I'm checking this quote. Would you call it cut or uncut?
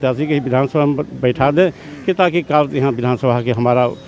uncut